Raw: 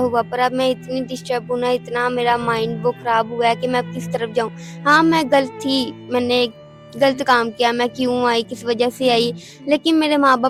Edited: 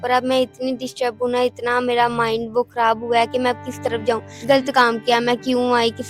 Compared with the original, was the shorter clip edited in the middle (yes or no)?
yes